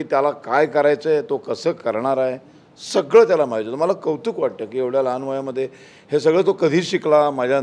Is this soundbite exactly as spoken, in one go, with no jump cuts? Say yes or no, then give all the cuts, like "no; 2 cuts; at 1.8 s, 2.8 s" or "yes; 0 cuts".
yes; 0 cuts